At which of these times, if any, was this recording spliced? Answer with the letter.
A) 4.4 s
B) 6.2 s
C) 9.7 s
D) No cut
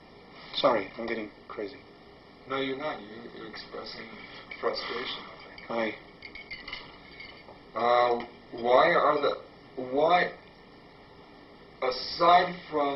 C